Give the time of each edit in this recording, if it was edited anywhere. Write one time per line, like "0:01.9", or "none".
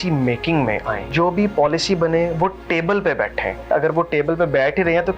0:01.0
0:03.7